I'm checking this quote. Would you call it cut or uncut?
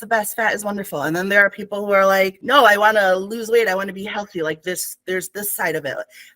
cut